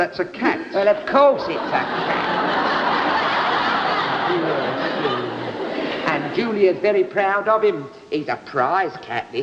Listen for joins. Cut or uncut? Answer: cut